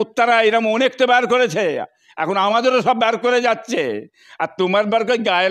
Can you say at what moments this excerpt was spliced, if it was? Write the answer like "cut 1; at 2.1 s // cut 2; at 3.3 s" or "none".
none